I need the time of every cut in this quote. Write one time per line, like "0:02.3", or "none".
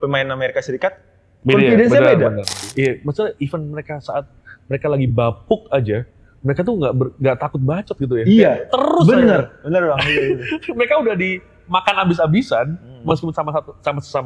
0:02.6